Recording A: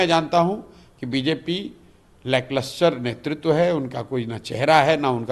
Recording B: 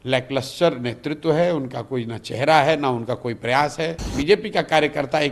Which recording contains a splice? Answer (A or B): B